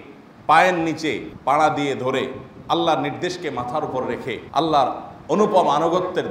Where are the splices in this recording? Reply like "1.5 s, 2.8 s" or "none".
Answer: 1.3 s, 4.4 s